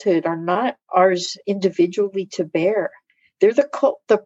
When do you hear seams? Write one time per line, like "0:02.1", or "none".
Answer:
none

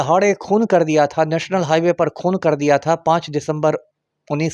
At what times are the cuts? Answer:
none

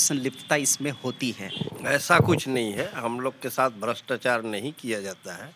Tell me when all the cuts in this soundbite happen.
0:01.7

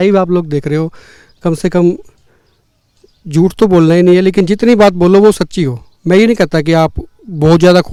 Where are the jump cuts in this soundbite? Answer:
none

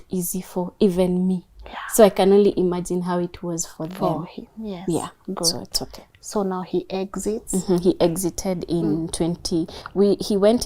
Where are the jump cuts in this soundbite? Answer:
none

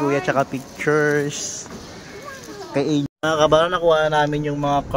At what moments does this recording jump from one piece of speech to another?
0:03.1

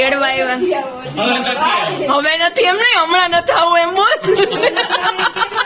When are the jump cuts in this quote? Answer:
none

